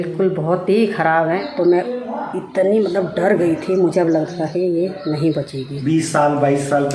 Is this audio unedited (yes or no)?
no